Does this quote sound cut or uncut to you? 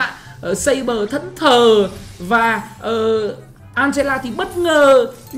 uncut